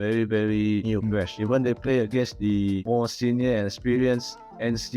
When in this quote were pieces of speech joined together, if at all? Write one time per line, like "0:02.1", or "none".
0:01.1
0:02.8